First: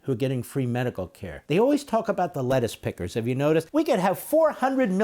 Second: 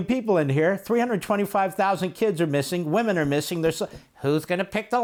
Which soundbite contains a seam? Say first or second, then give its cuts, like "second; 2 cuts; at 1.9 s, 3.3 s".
first; 2 cuts; at 1.4 s, 3.7 s